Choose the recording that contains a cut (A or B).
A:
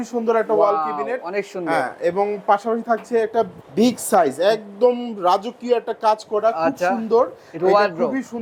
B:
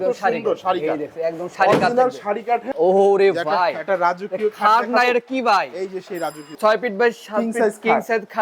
B